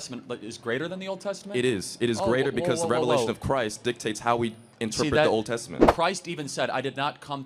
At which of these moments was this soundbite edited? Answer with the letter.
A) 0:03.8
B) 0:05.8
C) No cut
B